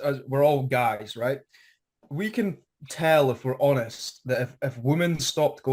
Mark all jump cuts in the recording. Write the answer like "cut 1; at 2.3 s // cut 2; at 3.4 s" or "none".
none